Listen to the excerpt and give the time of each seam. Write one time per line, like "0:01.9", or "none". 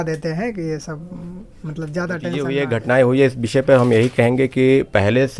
0:02.4